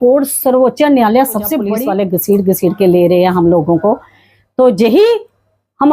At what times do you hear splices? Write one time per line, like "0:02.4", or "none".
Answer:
0:01.7